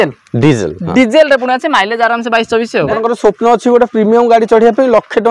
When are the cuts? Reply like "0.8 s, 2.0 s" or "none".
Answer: 2.9 s